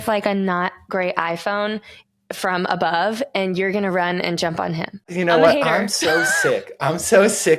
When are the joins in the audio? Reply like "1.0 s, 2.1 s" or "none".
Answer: 5.1 s